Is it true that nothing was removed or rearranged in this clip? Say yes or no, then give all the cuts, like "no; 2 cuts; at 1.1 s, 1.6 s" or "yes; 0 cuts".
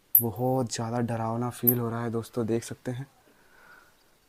yes; 0 cuts